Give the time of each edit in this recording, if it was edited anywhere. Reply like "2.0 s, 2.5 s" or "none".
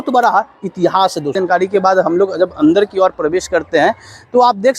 1.4 s